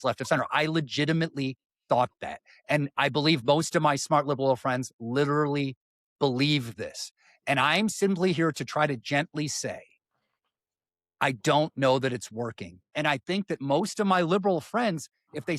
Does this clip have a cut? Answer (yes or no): yes